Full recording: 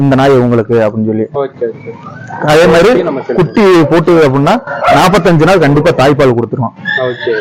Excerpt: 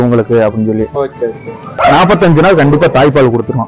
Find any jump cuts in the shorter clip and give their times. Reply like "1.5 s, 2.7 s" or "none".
1.7 s